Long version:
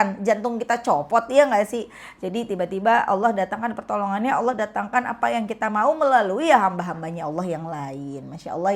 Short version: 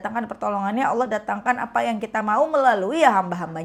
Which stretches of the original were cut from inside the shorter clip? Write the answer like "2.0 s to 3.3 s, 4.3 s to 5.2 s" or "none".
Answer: none